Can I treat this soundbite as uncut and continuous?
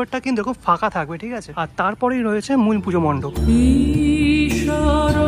yes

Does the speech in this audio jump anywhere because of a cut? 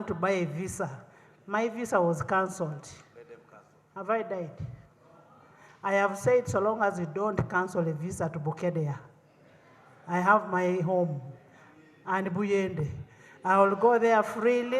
no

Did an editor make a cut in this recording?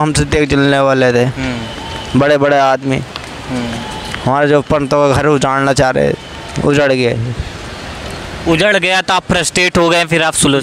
no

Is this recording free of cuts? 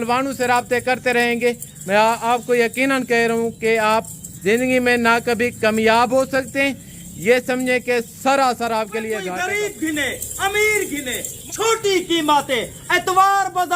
no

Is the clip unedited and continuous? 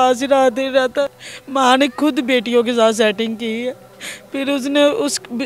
no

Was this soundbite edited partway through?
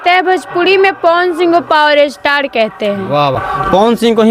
no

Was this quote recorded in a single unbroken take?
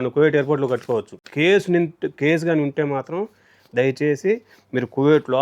no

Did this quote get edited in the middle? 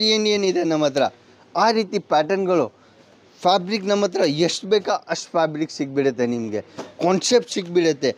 no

